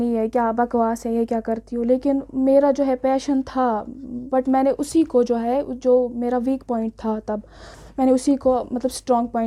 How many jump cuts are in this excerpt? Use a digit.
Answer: 0